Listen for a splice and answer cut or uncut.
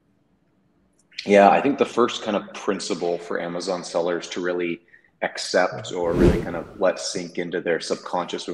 uncut